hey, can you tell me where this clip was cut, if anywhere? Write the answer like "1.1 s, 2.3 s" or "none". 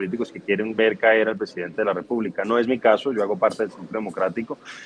none